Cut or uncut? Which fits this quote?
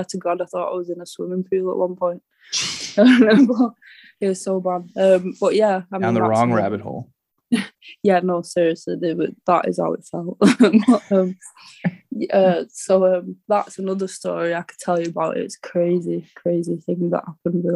uncut